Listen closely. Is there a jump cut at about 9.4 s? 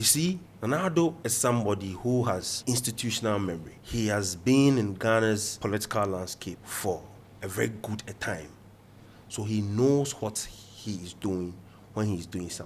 no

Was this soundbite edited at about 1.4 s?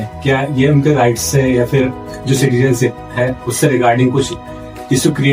no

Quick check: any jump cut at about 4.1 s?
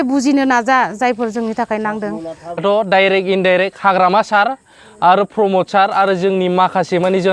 no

